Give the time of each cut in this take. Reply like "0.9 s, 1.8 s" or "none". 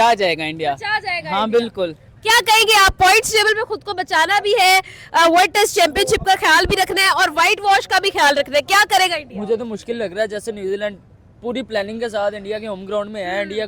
none